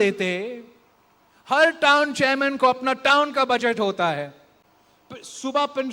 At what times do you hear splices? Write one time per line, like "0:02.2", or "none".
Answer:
none